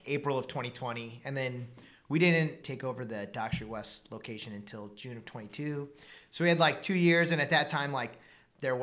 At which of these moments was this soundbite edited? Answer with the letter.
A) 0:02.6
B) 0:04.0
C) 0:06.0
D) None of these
A